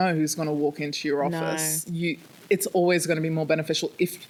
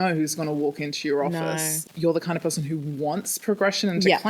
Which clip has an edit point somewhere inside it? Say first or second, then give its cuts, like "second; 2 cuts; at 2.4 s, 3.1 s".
second; 1 cut; at 1.8 s